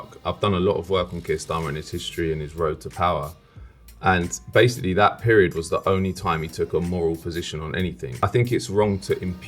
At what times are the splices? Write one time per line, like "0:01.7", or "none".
0:08.1